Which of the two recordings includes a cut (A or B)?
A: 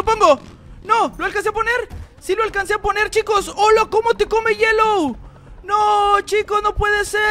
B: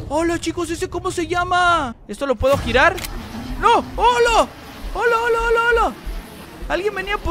B